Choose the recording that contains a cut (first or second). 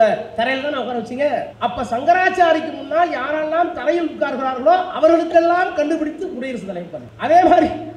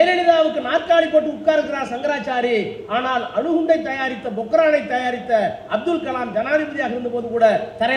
first